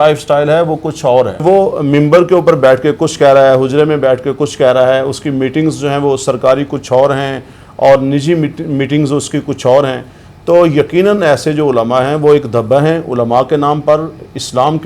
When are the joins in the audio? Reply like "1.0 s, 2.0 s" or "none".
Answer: 1.4 s